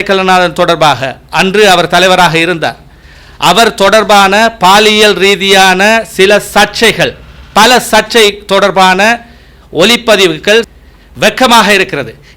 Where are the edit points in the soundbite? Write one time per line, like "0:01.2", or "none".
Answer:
0:10.7

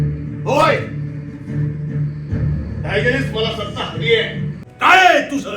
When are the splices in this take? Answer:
0:04.6

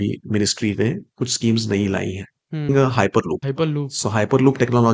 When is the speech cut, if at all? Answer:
0:02.7
0:03.5

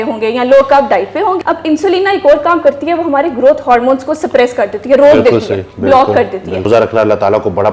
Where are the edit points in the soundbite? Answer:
0:01.4
0:06.7

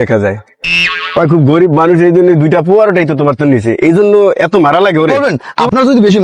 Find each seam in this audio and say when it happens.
0:05.2

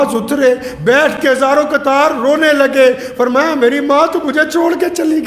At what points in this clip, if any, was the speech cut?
none

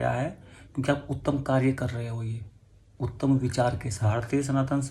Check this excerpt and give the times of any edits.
0:03.9

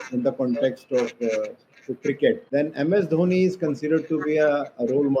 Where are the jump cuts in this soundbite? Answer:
0:02.4

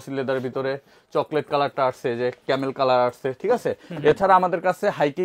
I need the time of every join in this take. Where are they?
none

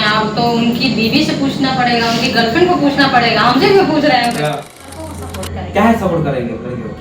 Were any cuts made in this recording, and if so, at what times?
0:05.0

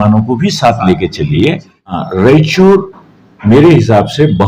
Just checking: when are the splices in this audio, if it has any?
0:02.0

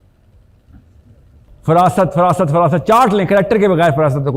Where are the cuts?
0:01.5

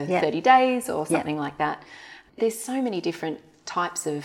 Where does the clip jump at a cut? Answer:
0:02.2

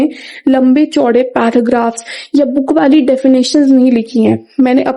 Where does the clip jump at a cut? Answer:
none

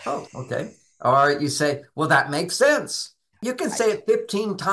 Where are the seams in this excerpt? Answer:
0:03.4

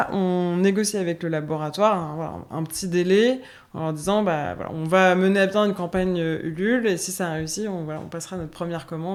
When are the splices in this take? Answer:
none

